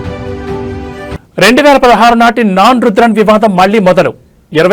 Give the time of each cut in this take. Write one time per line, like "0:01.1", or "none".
0:01.1